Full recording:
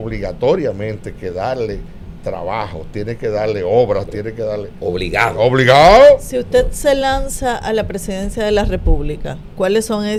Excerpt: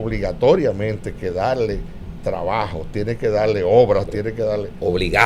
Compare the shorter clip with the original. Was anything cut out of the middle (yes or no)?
no